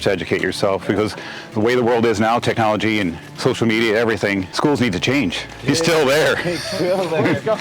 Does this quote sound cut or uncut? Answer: cut